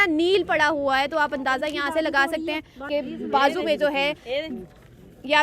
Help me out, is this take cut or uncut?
cut